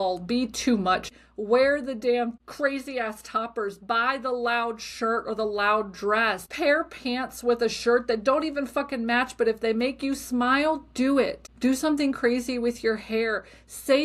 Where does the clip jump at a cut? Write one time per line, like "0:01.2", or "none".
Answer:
0:01.1
0:02.5
0:06.5
0:11.4